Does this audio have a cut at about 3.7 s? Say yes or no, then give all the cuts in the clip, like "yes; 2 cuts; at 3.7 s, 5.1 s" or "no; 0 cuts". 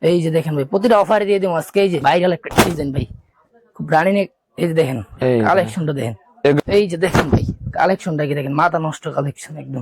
no; 2 cuts; at 2.0 s, 6.6 s